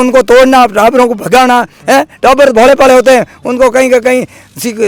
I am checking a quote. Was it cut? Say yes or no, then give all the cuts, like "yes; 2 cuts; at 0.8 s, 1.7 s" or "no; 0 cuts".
no; 0 cuts